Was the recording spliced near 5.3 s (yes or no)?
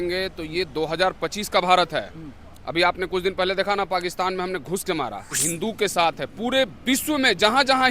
yes